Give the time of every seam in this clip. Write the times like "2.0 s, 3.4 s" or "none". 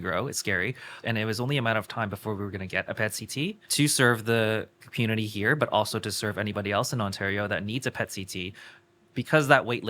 0.9 s, 3.6 s

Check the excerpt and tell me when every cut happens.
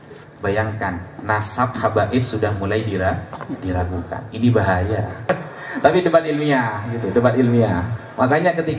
5.3 s

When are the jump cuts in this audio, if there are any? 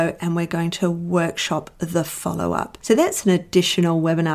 none

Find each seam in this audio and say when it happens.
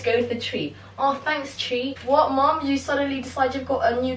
2.0 s

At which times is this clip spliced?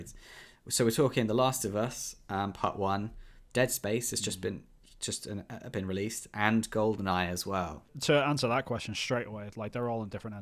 7.9 s

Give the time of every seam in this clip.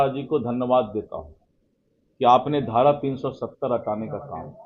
none

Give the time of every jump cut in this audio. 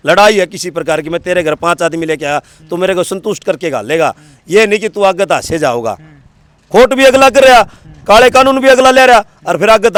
none

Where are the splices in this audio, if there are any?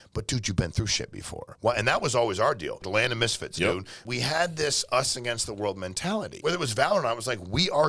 1.5 s, 2.8 s, 4.0 s, 6.3 s

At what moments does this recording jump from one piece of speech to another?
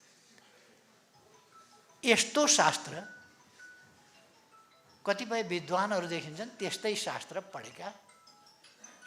none

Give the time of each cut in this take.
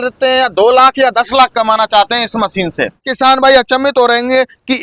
3.1 s

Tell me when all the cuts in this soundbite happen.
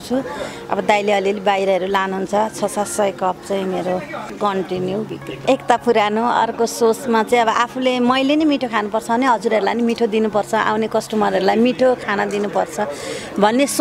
4.2 s, 5.5 s

